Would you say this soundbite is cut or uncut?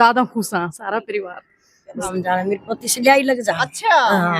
cut